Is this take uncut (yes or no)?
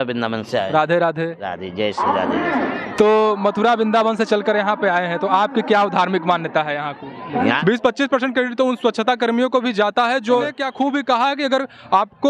no